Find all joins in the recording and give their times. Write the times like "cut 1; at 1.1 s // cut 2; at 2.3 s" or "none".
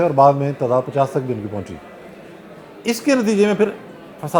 none